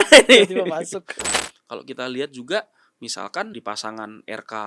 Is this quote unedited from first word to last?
no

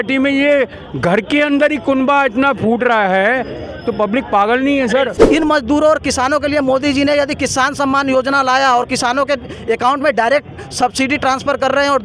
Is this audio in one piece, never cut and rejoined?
no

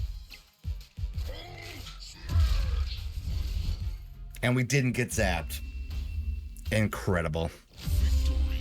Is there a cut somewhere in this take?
yes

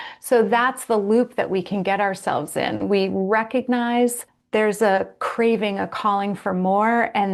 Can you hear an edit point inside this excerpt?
yes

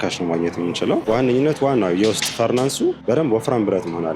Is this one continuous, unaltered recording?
no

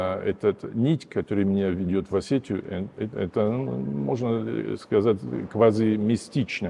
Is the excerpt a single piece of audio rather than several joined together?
yes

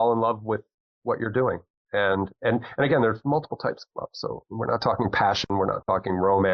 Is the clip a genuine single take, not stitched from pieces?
yes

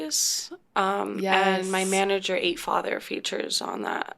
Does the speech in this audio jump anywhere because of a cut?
no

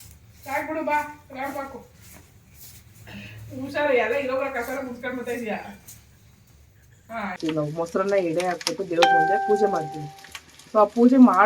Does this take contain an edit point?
yes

